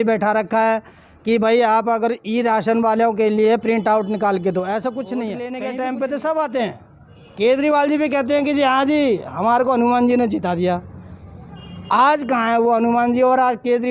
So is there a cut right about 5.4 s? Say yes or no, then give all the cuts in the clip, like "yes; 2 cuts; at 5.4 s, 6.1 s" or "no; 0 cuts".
yes; 1 cut; at 5.4 s